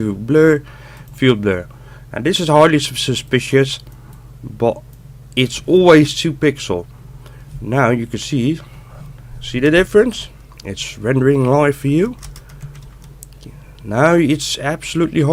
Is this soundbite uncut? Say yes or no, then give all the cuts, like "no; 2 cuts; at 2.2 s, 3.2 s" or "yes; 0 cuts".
yes; 0 cuts